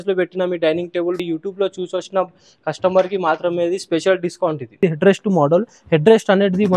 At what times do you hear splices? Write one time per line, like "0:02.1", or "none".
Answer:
0:01.2
0:04.8